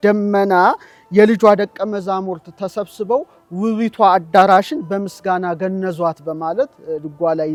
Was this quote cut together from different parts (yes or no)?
no